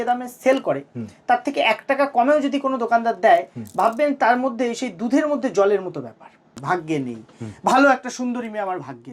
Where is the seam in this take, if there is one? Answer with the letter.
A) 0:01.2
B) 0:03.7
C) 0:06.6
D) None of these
C